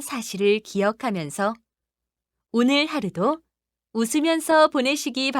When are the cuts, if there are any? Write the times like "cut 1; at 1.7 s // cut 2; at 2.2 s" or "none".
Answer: cut 1; at 2.9 s